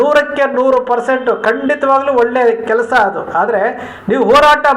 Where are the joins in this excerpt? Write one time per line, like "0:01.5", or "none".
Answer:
none